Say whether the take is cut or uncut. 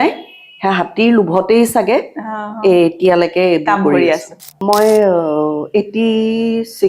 cut